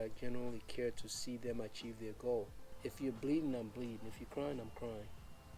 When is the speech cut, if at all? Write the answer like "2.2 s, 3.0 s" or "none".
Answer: 2.6 s

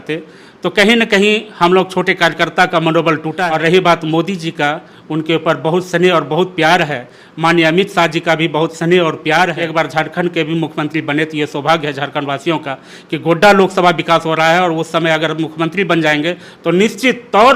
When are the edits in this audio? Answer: 3.3 s, 9.6 s

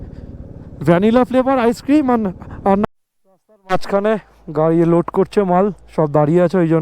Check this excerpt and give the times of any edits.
2.8 s

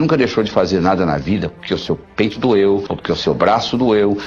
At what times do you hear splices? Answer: 2.9 s

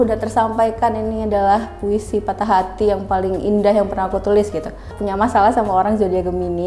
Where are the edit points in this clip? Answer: 5.0 s

